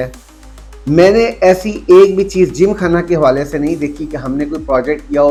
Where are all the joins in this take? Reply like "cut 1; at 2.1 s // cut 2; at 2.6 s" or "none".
none